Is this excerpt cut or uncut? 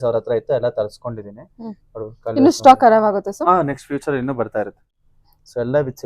cut